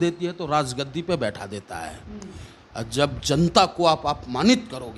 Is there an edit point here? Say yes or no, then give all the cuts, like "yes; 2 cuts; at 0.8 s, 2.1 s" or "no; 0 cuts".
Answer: no; 0 cuts